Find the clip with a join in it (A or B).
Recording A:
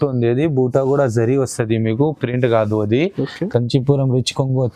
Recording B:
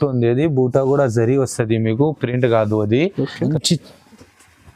B